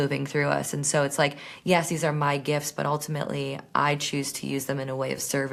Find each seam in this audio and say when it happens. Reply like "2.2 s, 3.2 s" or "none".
none

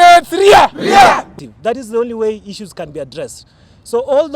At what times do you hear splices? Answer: 1.3 s

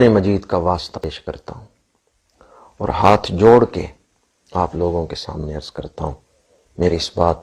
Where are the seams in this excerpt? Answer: 1.0 s

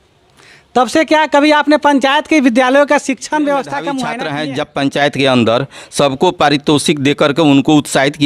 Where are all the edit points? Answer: 4.3 s

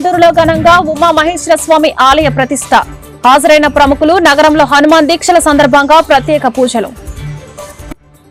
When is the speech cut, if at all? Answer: none

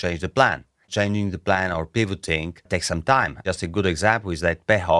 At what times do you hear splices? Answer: 0.9 s, 2.6 s, 3.4 s

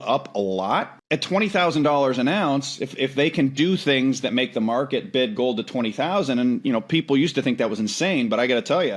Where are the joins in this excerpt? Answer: 1.0 s

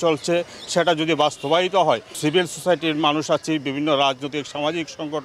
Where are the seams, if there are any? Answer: none

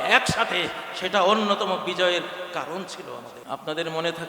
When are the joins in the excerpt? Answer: 3.3 s

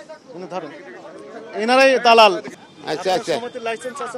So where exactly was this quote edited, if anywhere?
2.6 s

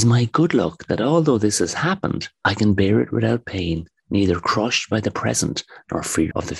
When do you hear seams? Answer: none

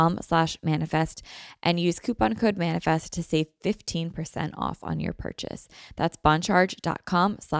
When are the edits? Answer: none

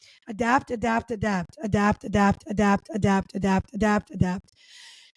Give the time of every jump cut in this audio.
none

